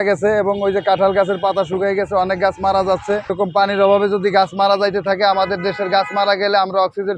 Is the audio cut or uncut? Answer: uncut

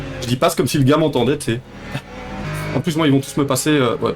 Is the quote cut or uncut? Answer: cut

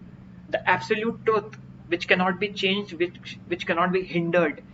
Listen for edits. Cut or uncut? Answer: uncut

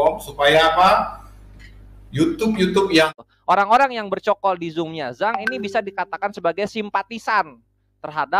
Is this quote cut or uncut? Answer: cut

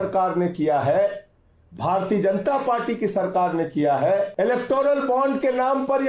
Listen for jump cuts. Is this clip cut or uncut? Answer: cut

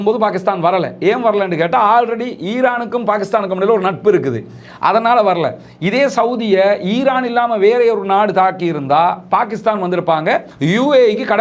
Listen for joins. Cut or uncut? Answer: cut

